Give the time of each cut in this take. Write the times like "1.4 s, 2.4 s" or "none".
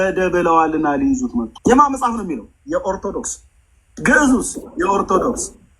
1.5 s